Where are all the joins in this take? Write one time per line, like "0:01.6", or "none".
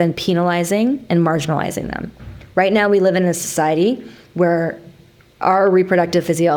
none